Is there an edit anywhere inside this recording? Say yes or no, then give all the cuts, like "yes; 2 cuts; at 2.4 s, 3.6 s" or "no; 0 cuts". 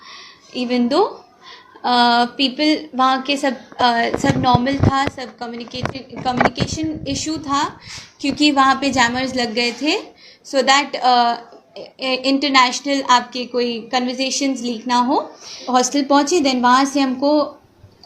yes; 1 cut; at 15.6 s